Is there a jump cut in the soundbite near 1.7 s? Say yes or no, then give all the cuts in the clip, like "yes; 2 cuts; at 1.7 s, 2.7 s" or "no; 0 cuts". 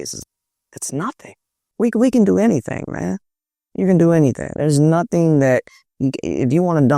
yes; 1 cut; at 1.7 s